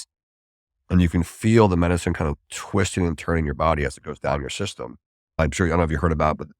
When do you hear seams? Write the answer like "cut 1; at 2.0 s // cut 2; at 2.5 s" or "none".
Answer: cut 1; at 5.4 s